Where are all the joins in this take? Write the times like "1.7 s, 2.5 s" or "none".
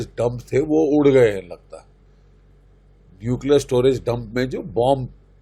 none